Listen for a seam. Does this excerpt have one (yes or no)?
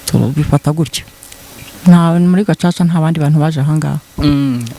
yes